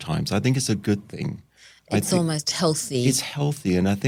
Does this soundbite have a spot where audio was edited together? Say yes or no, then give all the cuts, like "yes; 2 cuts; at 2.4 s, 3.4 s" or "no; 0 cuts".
no; 0 cuts